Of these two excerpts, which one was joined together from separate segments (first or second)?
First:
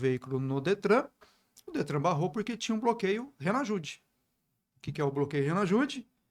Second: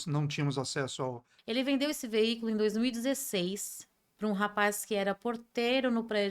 second